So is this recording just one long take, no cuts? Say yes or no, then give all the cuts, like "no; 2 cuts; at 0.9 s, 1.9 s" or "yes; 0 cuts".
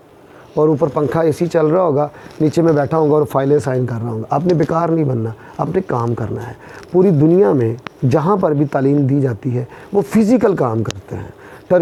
yes; 0 cuts